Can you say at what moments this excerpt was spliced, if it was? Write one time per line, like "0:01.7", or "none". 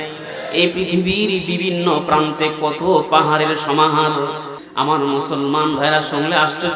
0:04.5